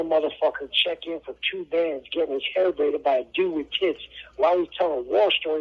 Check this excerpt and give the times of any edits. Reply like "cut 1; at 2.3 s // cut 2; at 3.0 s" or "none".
none